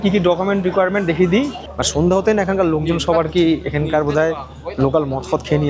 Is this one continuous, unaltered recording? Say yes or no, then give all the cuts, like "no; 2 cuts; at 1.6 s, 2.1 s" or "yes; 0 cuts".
no; 1 cut; at 1.6 s